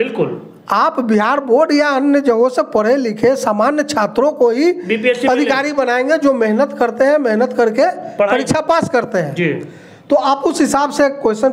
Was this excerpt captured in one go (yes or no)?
yes